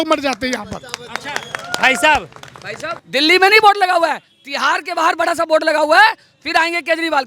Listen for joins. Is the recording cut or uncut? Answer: cut